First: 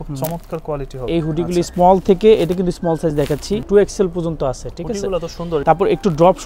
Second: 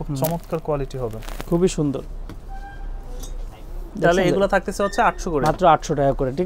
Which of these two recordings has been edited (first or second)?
first